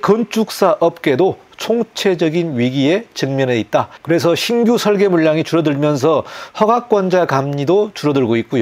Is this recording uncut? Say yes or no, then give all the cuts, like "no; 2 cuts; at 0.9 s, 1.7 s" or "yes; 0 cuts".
yes; 0 cuts